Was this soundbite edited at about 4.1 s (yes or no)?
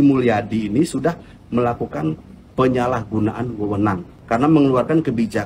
yes